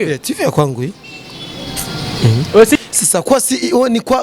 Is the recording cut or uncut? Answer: cut